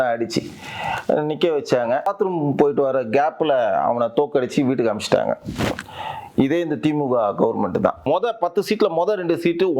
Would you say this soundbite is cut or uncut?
cut